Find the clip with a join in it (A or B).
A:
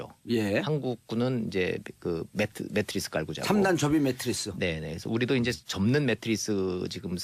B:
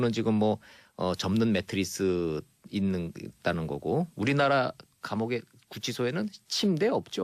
A